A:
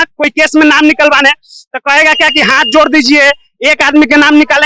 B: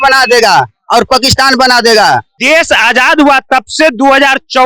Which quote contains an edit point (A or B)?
B